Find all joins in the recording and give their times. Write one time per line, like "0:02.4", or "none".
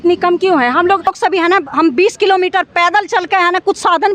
0:01.1